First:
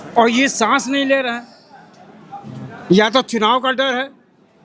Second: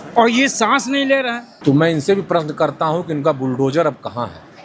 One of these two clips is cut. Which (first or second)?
second